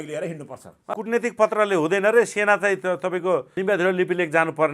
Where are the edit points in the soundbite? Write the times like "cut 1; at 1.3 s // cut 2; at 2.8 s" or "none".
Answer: cut 1; at 0.9 s // cut 2; at 3.5 s

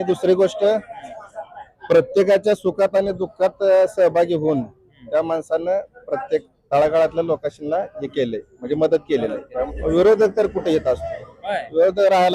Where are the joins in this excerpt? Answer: cut 1; at 9.7 s

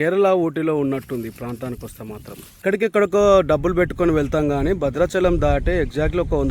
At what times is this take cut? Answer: cut 1; at 2.6 s

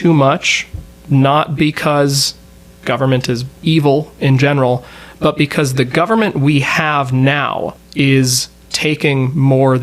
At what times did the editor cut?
cut 1; at 3.5 s // cut 2; at 7.8 s

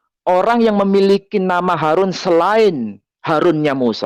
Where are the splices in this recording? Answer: none

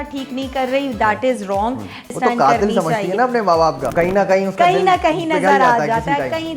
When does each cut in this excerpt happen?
cut 1; at 2.1 s // cut 2; at 3.9 s

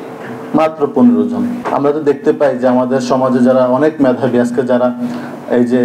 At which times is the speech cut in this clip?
cut 1; at 1.6 s

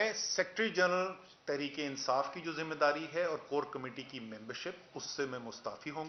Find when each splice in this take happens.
none

